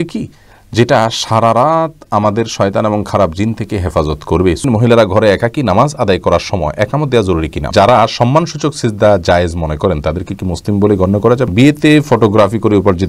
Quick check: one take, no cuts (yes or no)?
no